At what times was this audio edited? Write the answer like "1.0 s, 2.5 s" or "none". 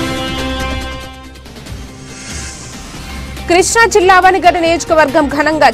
3.5 s